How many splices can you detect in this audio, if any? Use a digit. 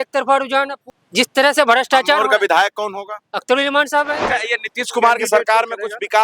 2